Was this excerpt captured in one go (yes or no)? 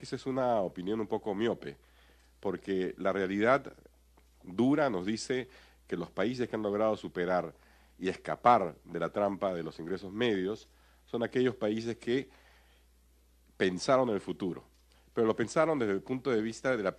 yes